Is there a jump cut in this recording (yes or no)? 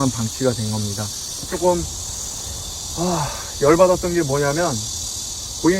yes